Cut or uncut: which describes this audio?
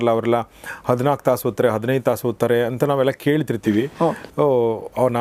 uncut